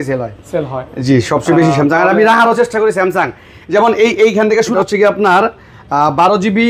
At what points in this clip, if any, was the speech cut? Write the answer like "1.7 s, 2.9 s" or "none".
4.7 s